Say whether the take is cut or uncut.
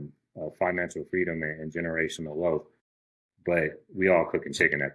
uncut